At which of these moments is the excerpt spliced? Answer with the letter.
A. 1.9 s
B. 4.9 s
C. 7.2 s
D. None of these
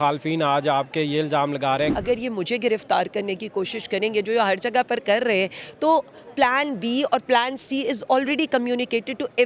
A